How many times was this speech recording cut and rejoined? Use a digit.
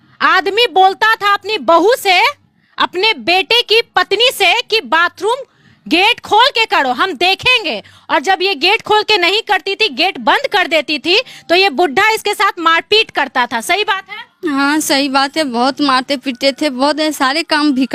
0